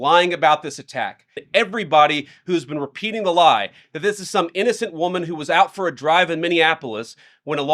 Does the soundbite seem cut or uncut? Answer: cut